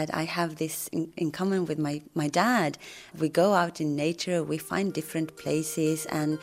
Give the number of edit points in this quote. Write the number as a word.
one